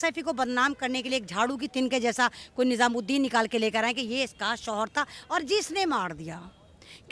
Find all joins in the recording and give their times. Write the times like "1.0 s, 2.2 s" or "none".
none